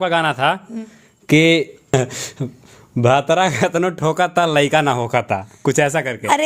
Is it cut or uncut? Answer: cut